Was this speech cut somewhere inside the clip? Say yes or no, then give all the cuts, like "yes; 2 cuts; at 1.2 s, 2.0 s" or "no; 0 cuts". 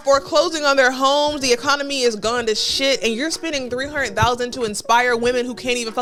no; 0 cuts